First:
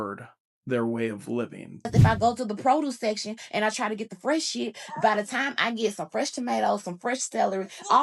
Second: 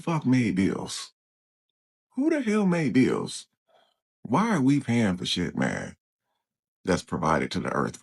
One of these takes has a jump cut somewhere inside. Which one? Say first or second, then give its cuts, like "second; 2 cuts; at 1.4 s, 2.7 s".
first; 1 cut; at 1.9 s